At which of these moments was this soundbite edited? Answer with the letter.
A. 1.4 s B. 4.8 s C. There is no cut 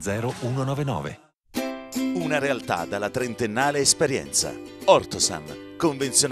A